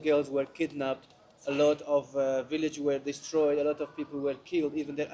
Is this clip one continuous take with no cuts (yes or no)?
yes